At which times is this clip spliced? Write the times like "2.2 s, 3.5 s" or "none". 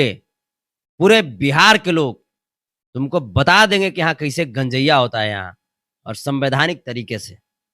none